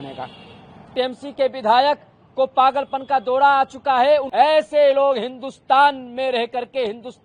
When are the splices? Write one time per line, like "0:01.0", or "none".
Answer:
0:00.9
0:04.3